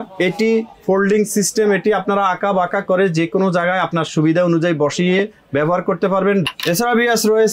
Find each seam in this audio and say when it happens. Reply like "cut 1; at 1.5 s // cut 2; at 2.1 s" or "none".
cut 1; at 6.4 s